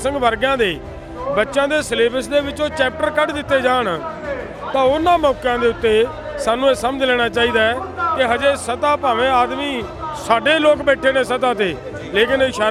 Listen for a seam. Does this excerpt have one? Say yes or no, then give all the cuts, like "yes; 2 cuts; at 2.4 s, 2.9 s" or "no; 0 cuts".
no; 0 cuts